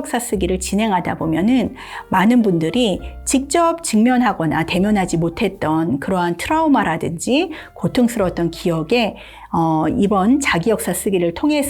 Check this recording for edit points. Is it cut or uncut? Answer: uncut